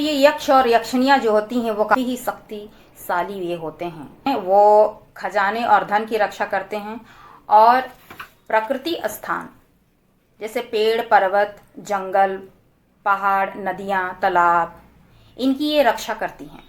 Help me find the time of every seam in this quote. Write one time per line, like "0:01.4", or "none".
0:02.0